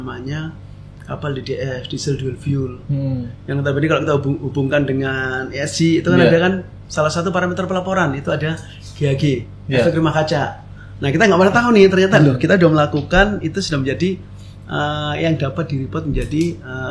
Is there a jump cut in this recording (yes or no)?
no